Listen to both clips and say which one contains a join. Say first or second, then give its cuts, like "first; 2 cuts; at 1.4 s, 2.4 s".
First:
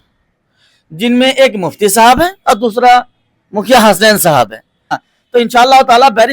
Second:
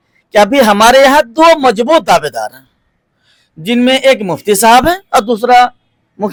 first; 1 cut; at 5.1 s